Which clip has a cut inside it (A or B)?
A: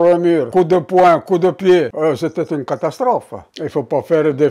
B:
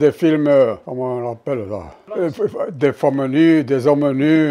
A